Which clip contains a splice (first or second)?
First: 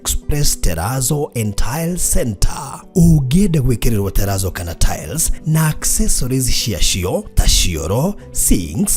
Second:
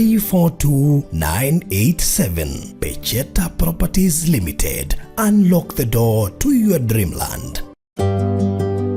second